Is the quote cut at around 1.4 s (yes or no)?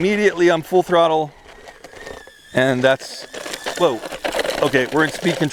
no